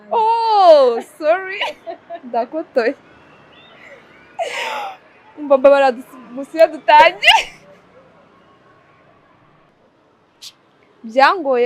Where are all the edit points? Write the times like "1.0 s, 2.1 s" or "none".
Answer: 9.7 s